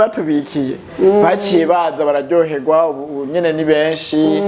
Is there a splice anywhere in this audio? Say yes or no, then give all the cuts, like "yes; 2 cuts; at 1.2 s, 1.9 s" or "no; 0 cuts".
no; 0 cuts